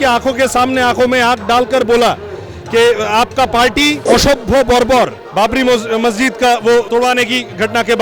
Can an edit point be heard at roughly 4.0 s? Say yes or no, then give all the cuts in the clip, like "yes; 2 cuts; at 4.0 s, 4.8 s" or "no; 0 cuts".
yes; 2 cuts; at 4.0 s, 6.9 s